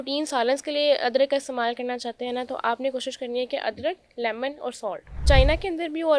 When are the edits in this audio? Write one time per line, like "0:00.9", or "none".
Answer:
0:05.2